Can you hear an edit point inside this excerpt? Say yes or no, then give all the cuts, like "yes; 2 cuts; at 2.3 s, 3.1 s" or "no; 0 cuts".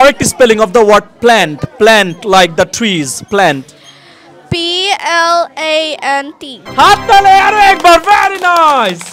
no; 0 cuts